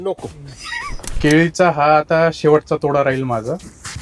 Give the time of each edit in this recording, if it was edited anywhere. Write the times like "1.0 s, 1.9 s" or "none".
1.1 s